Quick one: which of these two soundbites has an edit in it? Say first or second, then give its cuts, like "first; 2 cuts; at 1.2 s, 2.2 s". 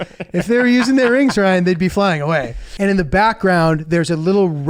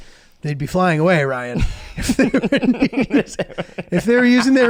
first; 1 cut; at 2.6 s